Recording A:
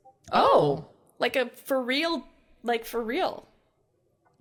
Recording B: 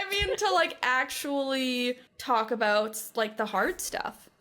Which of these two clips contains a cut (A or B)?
B